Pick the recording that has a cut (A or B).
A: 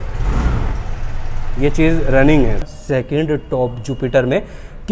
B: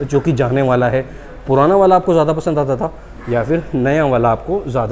A